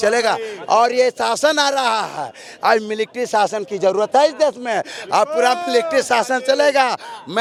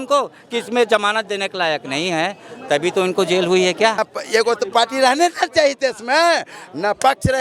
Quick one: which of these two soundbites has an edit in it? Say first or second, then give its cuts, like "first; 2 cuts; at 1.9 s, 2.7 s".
second; 1 cut; at 4.0 s